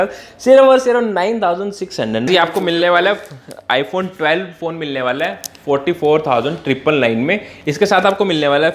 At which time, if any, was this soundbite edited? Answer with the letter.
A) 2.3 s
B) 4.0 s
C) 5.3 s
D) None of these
A